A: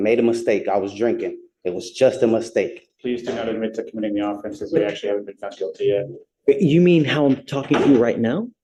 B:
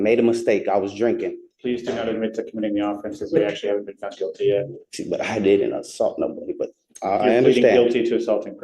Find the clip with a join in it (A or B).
B